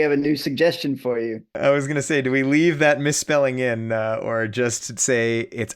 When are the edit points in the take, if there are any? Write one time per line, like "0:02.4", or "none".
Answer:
0:01.5

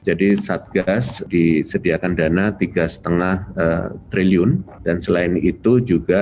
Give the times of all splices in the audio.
0:01.1
0:04.7

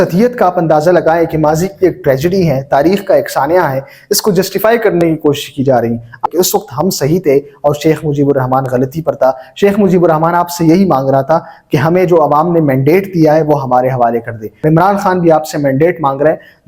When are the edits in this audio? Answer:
0:06.2
0:14.5

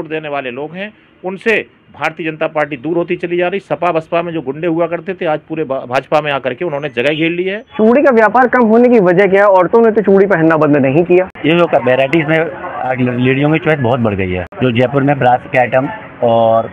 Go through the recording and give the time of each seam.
0:07.7
0:11.3
0:14.5

